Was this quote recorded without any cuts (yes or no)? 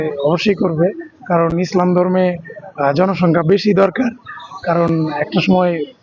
yes